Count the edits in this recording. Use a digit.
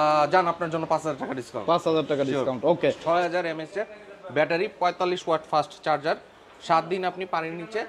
1